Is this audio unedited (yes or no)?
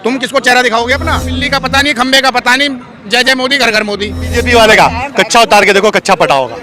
no